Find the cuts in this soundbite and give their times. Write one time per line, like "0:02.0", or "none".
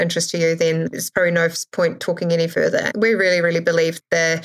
0:02.9